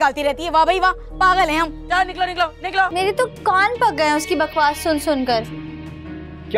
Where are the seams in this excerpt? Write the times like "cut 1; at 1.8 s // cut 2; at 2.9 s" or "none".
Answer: cut 1; at 2.9 s